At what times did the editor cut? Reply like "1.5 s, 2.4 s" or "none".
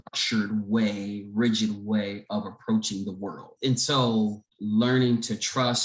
3.5 s, 4.5 s